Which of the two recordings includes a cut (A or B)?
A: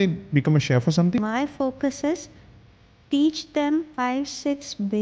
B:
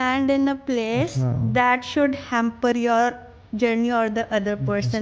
A